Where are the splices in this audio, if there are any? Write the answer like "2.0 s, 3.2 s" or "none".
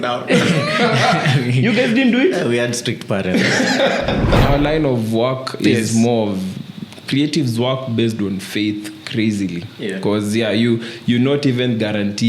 4.4 s